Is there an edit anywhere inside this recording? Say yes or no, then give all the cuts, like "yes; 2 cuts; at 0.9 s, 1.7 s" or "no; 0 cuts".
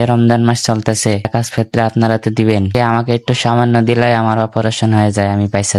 yes; 2 cuts; at 1.3 s, 2.7 s